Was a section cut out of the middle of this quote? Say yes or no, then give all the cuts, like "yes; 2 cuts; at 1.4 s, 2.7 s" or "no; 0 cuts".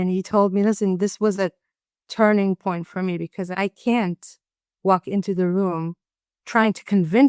yes; 2 cuts; at 3.5 s, 6.3 s